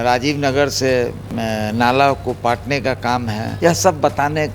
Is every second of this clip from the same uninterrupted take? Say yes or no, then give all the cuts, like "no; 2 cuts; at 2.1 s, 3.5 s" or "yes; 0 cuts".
no; 2 cuts; at 1.2 s, 3.5 s